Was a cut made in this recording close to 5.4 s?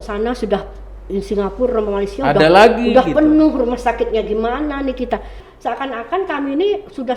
yes; 1 cut; at 5.4 s

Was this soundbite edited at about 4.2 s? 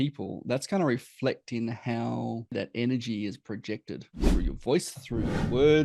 yes; 2 cuts; at 2.5 s, 4.2 s

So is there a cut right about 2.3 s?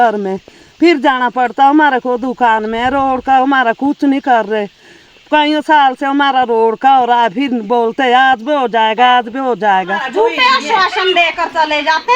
no; 1 cut; at 10.0 s

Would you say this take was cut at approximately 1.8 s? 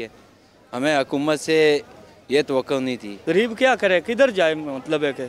no; 1 cut; at 3.1 s

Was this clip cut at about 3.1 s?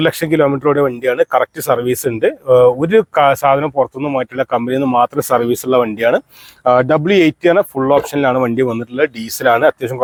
no; 0 cuts

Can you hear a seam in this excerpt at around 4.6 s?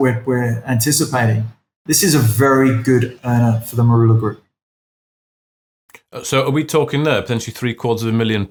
no; 0 cuts

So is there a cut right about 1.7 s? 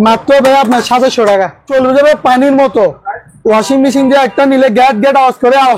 yes; 1 cut; at 1.7 s

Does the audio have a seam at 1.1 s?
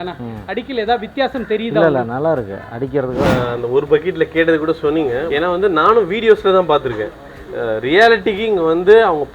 no; 2 cuts; at 3.3 s, 5.3 s

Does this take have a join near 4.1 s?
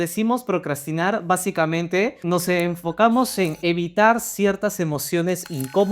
no; 1 cut; at 2.2 s

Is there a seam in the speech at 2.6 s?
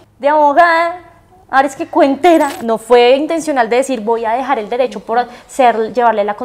yes; 1 cut; at 2.6 s

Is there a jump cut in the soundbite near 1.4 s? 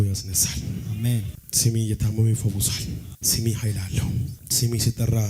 yes; 3 cuts; at 1.4 s, 3.1 s, 4.4 s

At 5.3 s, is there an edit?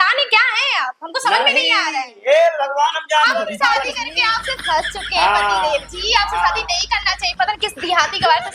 no; 0 cuts

